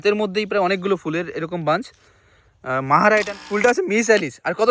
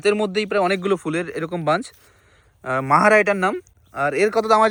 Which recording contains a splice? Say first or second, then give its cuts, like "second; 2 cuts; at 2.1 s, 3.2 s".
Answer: first; 1 cut; at 3.4 s